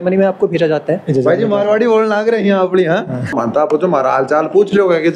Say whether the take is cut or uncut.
cut